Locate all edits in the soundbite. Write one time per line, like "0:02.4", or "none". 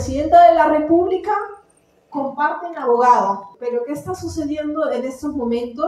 0:03.5